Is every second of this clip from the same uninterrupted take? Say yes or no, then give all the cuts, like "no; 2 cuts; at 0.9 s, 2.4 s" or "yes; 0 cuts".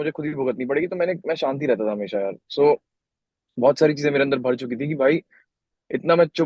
yes; 0 cuts